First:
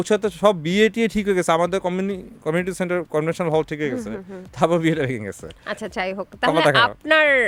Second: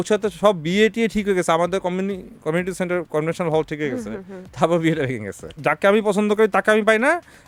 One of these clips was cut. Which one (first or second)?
second